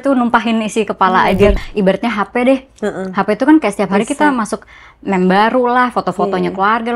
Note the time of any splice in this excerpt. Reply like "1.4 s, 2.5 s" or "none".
1.5 s